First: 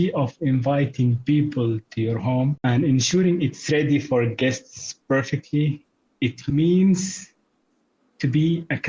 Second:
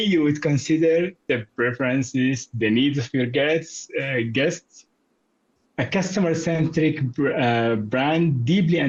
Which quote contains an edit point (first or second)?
first